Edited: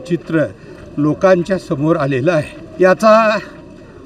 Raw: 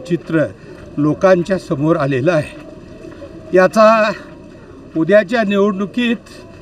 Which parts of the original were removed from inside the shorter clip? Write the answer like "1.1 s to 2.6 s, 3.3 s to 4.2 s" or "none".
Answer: 2.6 s to 3.3 s